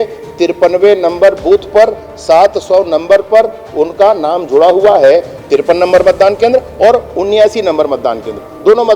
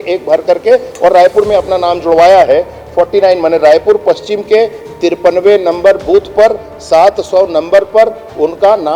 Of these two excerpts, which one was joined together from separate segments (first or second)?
first